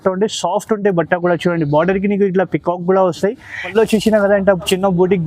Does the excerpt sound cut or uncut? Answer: cut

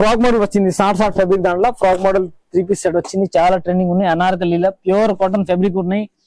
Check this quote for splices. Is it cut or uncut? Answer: uncut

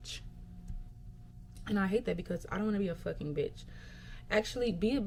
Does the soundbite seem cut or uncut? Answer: uncut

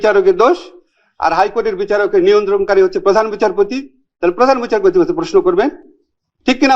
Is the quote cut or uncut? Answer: uncut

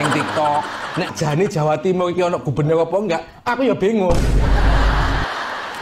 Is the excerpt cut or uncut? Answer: cut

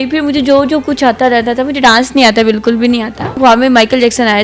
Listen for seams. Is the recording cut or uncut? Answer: cut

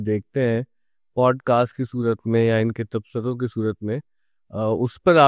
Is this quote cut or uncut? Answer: uncut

